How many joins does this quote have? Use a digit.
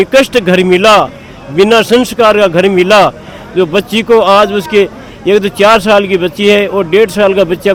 0